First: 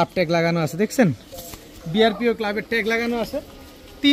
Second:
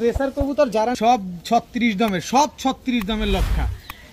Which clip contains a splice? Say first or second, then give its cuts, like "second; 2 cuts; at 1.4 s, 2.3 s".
second; 1 cut; at 0.9 s